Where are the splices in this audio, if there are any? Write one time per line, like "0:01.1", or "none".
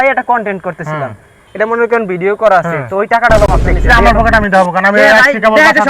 0:03.7